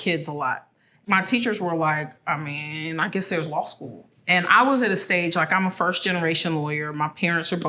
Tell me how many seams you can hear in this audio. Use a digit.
1